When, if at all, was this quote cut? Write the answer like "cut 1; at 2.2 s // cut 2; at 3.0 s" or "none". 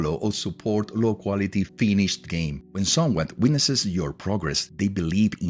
cut 1; at 2.6 s // cut 2; at 4.6 s